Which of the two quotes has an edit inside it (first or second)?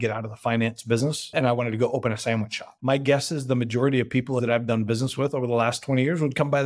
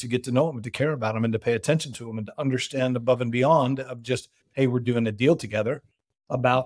first